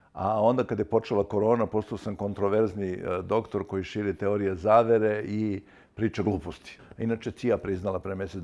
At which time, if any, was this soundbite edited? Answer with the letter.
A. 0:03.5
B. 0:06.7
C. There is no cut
B